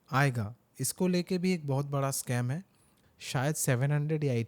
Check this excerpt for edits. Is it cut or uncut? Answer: cut